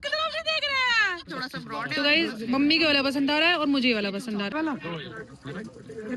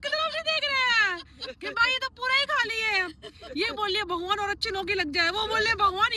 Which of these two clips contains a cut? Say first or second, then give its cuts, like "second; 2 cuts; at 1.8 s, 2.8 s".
first; 2 cuts; at 1.3 s, 4.5 s